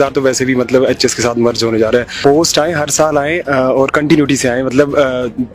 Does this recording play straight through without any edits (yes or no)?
no